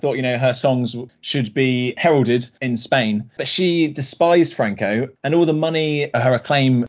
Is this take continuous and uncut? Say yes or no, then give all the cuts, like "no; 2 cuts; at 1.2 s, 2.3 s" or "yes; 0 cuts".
no; 2 cuts; at 2.6 s, 5.1 s